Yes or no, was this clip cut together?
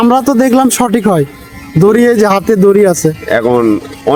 no